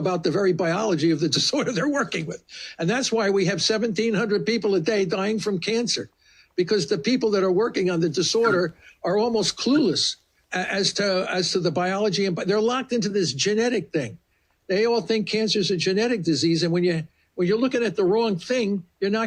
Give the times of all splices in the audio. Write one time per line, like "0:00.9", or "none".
none